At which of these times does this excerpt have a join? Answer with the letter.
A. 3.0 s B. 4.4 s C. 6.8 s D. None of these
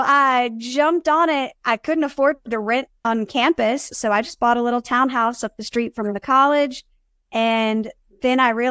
A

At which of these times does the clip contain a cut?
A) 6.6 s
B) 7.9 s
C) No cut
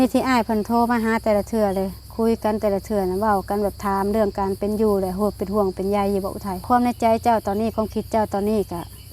A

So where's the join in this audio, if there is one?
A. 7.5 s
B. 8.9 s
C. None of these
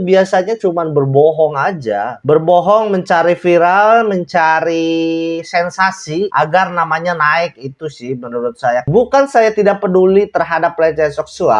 B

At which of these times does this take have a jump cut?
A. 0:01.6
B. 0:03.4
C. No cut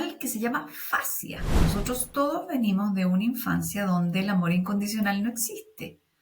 A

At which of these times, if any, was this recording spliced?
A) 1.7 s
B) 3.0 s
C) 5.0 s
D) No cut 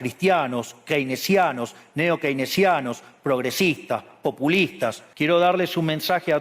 C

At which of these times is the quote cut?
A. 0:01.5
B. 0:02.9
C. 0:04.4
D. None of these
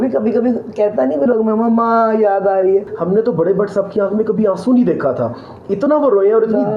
B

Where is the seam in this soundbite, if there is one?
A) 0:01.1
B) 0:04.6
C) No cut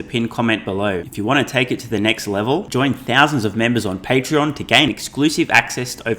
A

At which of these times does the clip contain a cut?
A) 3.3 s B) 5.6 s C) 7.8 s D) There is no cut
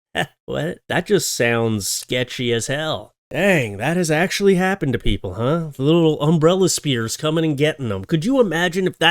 A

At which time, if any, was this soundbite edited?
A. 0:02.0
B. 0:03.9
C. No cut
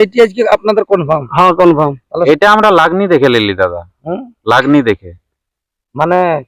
A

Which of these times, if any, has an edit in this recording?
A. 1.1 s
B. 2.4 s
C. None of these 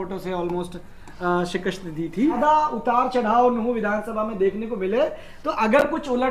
B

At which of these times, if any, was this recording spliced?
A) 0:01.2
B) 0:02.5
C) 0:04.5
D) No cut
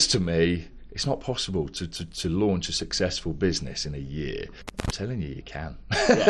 C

